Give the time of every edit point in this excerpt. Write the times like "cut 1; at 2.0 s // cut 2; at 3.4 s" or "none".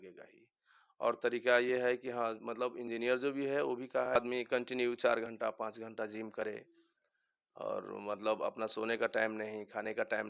cut 1; at 4.2 s

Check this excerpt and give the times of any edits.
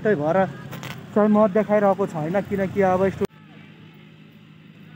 cut 1; at 3.3 s

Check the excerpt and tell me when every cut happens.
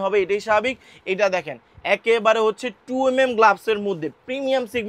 none

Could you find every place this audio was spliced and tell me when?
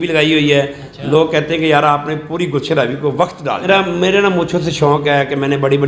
cut 1; at 3.6 s

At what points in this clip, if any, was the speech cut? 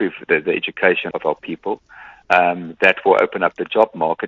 cut 1; at 1.1 s

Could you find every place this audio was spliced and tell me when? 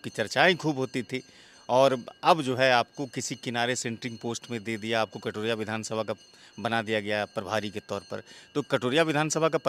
none

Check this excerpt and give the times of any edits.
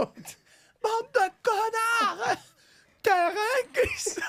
none

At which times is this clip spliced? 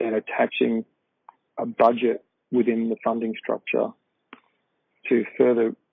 none

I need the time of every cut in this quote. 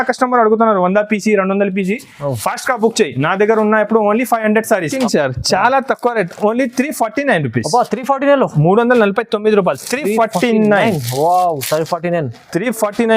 cut 1; at 4.9 s

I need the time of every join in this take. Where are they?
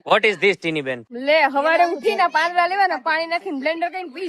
cut 1; at 1.0 s

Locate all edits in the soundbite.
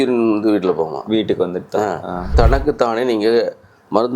cut 1; at 2.3 s

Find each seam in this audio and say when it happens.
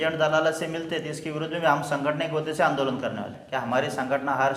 cut 1; at 3.4 s

